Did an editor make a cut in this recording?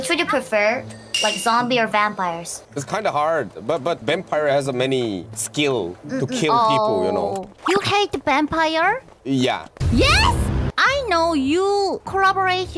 yes; 1 cut; at 2.7 s

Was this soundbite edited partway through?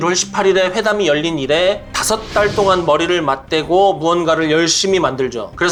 no; 0 cuts

